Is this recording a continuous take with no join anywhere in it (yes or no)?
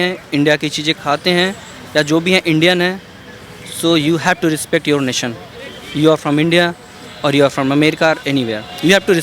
yes